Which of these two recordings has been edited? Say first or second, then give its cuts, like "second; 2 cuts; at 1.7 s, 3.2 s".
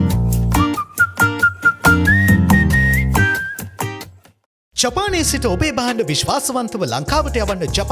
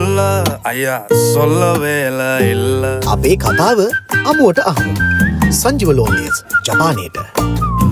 first; 1 cut; at 4.6 s